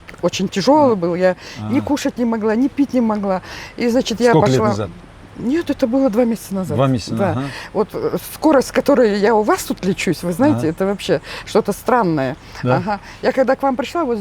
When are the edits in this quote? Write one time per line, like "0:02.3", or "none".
none

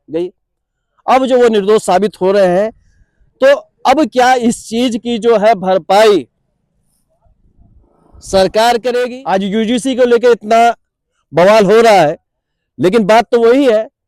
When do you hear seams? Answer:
0:09.2

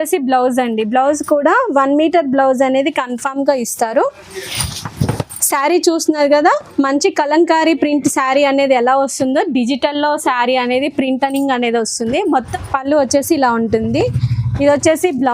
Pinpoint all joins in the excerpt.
0:12.5

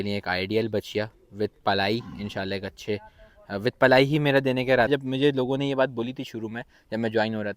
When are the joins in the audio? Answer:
0:04.9

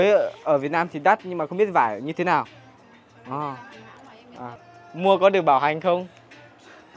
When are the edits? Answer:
0:04.7

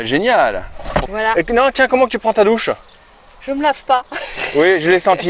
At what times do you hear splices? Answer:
0:01.1

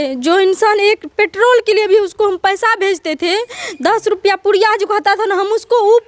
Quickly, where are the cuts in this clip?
none

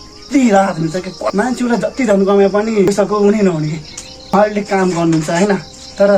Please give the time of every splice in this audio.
0:01.2

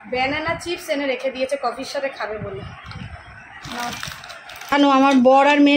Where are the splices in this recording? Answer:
0:04.7

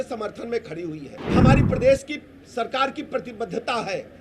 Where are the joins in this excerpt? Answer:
0:01.2

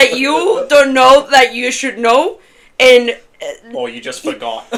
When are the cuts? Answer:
none

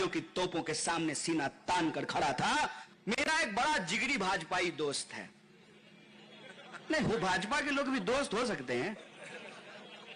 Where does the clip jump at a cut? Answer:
0:02.8

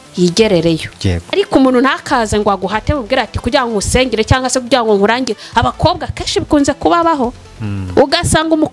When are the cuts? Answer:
0:01.2

